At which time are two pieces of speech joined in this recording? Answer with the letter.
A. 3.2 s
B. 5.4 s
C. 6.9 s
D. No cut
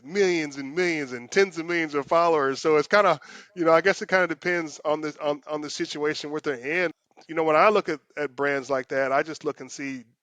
C